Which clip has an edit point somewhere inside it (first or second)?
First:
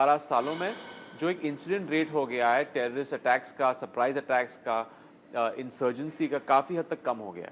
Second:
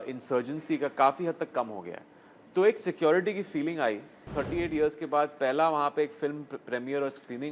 second